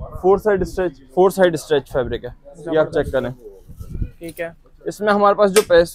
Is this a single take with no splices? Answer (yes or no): yes